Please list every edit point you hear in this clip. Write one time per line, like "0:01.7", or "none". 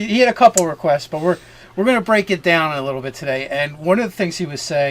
0:03.4